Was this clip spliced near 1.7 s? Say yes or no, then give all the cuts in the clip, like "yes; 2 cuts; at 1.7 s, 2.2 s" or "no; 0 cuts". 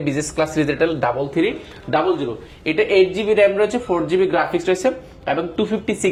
no; 0 cuts